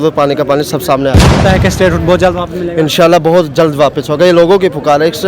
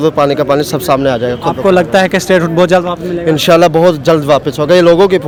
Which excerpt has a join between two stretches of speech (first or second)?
first